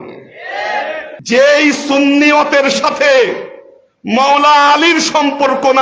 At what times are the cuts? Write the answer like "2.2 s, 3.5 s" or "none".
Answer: 1.1 s